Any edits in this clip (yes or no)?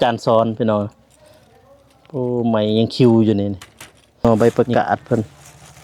yes